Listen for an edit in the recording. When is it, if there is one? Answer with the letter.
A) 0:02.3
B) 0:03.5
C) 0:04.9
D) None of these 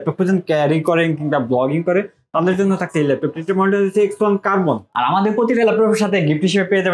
C